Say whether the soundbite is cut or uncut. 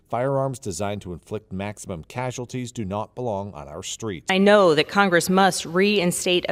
uncut